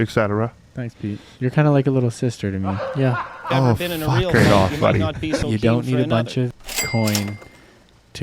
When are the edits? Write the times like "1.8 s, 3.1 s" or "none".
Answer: 5.4 s, 6.7 s